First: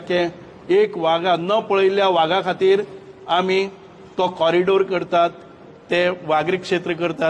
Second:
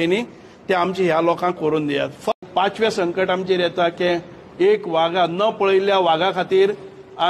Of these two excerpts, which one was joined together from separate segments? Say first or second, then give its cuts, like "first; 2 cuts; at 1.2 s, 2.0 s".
second; 1 cut; at 2.4 s